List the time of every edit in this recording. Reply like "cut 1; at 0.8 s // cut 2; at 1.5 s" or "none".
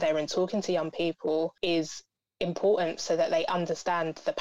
cut 1; at 1.6 s